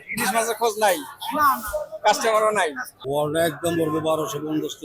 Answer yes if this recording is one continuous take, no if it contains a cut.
no